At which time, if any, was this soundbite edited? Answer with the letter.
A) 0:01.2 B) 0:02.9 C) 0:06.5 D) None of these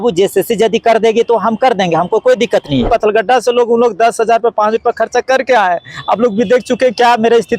B